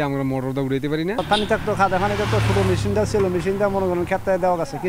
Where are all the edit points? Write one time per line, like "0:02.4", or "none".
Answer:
0:01.2